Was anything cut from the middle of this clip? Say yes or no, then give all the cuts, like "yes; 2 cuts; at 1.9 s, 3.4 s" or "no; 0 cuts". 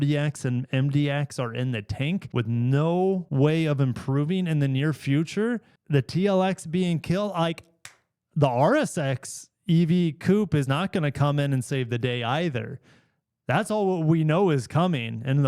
yes; 2 cuts; at 2.3 s, 3.3 s